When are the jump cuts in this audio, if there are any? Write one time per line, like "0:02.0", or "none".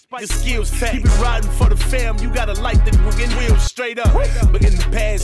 none